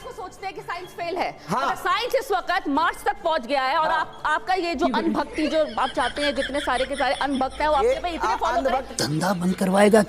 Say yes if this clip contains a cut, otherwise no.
yes